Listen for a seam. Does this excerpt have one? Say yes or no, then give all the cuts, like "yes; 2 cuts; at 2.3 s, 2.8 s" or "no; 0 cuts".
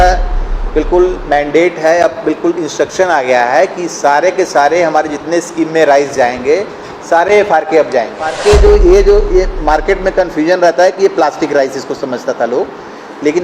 yes; 1 cut; at 8.3 s